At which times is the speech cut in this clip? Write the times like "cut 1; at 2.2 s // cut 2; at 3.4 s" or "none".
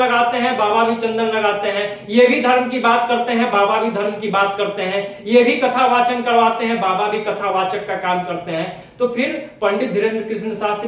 none